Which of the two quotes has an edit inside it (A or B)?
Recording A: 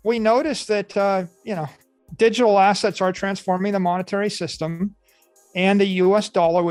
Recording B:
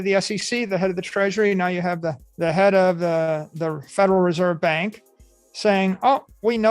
B